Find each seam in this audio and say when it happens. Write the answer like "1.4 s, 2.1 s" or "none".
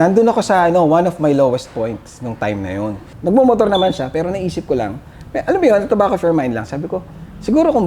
3.1 s